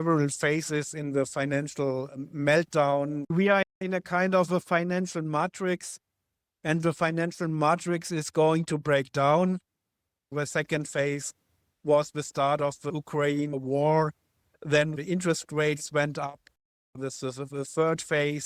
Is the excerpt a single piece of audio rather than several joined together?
no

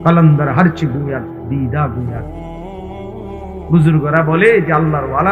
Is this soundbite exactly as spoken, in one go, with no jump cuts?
no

